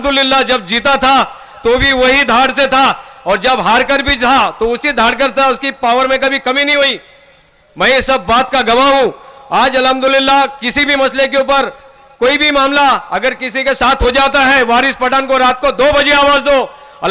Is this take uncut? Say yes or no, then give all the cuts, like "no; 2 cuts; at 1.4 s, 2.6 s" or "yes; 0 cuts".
yes; 0 cuts